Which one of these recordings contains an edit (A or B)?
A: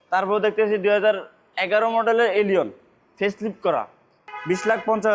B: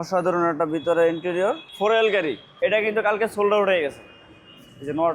B